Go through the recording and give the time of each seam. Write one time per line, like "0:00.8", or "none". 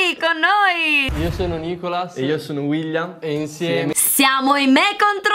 0:01.1